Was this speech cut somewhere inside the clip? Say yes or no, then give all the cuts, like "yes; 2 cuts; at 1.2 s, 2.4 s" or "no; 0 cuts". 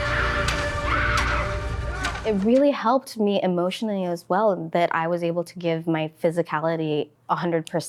no; 0 cuts